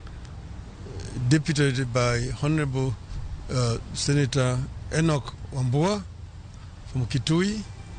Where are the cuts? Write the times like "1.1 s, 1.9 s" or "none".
none